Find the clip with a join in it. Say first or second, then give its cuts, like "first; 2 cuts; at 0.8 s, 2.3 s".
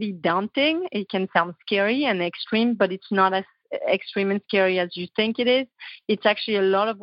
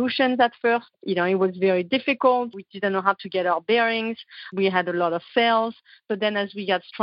second; 3 cuts; at 1.0 s, 2.5 s, 4.4 s